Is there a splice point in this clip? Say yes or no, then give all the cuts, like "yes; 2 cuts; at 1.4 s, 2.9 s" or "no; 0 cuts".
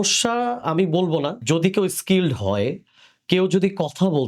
yes; 1 cut; at 1.4 s